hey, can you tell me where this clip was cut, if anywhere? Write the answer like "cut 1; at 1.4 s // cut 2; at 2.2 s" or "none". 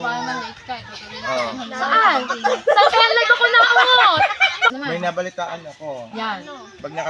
cut 1; at 4.8 s